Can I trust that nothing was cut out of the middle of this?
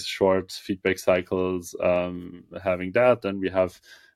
yes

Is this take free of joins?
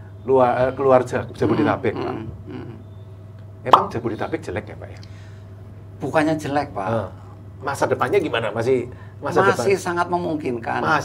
yes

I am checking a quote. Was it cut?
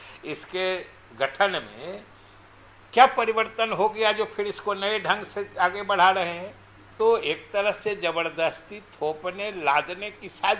yes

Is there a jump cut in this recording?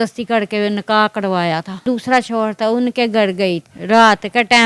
yes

